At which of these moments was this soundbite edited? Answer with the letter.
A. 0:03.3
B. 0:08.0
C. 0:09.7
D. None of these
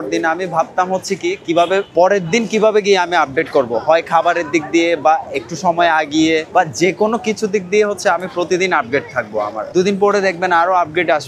C